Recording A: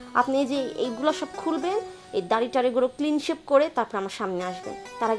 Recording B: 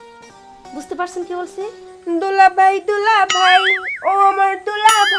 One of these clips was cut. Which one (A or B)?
B